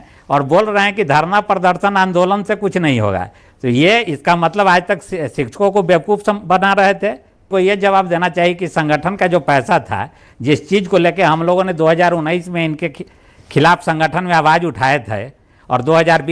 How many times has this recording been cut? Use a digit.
1